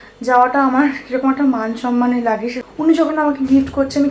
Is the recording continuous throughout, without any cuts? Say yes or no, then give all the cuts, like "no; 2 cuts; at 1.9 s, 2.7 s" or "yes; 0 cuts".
no; 1 cut; at 2.6 s